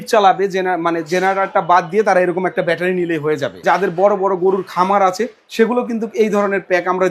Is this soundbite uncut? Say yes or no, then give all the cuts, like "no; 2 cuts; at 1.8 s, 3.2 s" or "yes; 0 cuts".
no; 1 cut; at 3.6 s